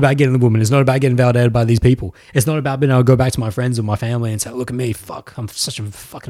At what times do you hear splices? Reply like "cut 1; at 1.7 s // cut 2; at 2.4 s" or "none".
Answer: none

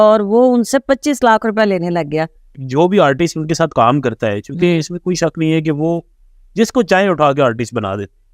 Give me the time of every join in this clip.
cut 1; at 2.6 s

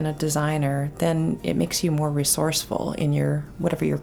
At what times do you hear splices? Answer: none

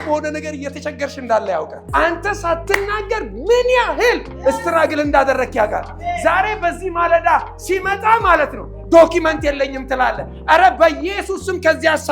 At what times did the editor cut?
cut 1; at 1.8 s

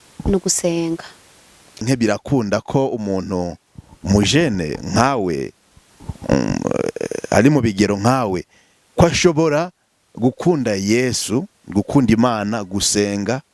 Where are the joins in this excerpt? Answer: cut 1; at 1.8 s

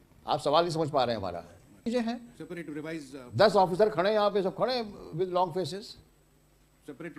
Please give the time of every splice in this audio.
cut 1; at 1.9 s

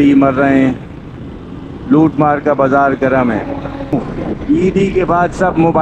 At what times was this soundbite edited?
cut 1; at 3.9 s

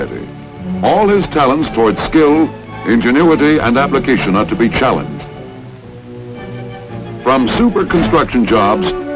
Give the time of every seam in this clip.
none

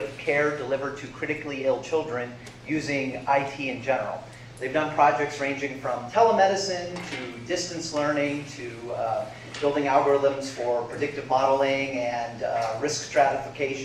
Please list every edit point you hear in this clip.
cut 1; at 6.6 s

